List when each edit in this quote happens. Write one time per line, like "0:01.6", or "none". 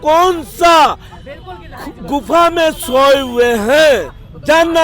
none